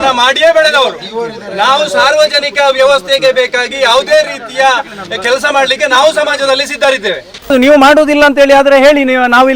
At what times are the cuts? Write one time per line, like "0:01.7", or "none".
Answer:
0:07.5